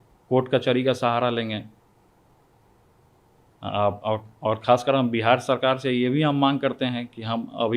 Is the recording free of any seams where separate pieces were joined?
yes; 0 cuts

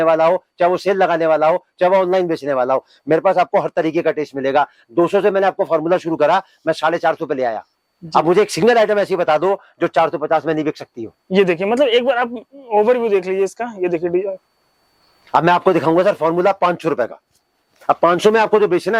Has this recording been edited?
no; 0 cuts

